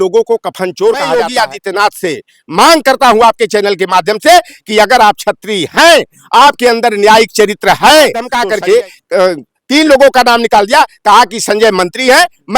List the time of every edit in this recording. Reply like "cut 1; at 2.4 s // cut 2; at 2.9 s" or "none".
cut 1; at 1.3 s // cut 2; at 8.4 s